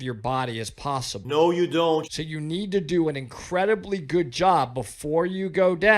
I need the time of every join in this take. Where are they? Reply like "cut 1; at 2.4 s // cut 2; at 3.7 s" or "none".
cut 1; at 1.2 s // cut 2; at 2.1 s